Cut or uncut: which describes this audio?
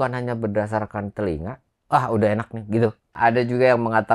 cut